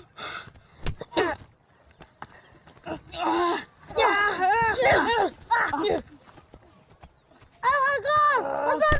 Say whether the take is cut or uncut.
cut